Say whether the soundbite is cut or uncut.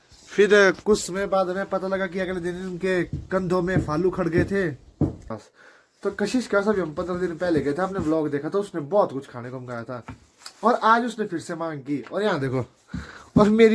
cut